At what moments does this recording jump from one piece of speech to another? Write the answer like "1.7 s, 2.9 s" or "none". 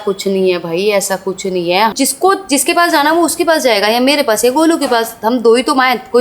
1.9 s